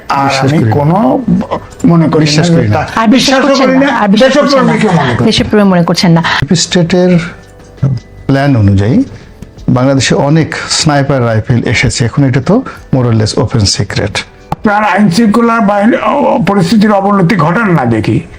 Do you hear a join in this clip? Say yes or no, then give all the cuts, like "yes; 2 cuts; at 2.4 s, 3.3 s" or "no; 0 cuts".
yes; 2 cuts; at 6.4 s, 14.6 s